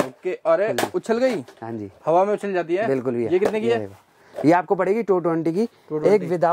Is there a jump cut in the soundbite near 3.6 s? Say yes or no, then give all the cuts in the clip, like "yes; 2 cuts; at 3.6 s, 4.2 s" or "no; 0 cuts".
no; 0 cuts